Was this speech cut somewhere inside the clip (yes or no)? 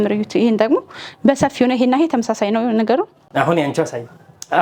yes